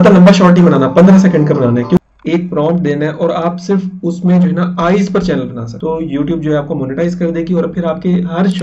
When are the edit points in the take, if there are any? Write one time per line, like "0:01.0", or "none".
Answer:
0:02.0
0:05.7